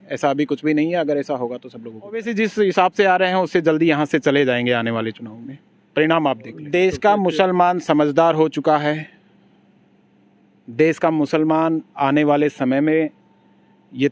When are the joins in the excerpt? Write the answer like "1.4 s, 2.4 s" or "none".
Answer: 2.3 s, 6.6 s